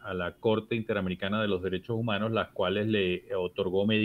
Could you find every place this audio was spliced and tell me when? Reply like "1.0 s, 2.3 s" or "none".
none